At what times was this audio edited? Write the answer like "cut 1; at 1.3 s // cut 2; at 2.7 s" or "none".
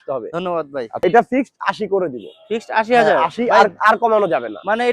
cut 1; at 1.0 s